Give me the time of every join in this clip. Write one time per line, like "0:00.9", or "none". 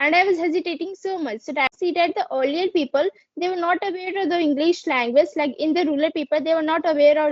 0:01.7